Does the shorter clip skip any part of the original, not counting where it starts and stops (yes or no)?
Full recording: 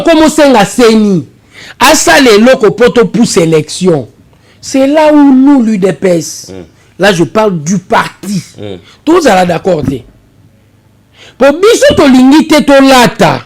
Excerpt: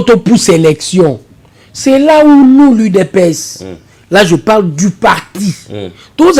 no